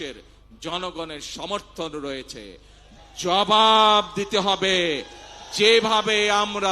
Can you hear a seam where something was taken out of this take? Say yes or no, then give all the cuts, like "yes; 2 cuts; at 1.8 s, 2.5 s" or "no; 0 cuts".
yes; 1 cut; at 2.8 s